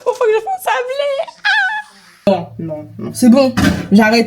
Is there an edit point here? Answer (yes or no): yes